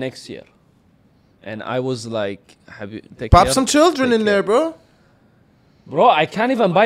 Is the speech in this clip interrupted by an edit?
no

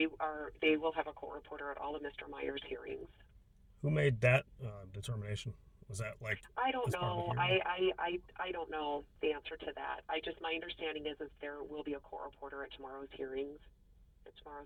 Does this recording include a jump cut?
no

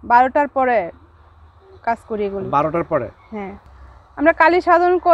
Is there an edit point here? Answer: no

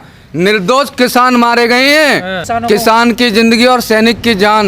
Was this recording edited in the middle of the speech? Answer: yes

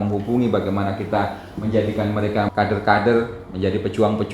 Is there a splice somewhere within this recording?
yes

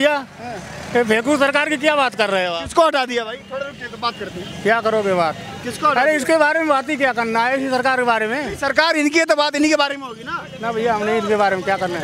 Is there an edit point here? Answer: no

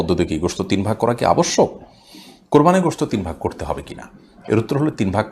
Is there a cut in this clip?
no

